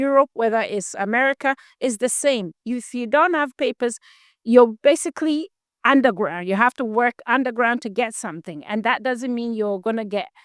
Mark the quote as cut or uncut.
uncut